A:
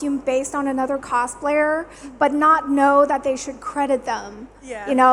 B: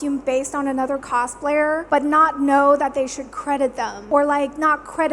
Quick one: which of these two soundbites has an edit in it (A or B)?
B